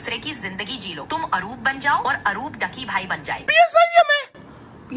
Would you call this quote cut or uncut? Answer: cut